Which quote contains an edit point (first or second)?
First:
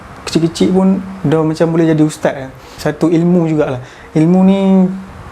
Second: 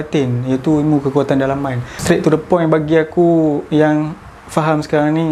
first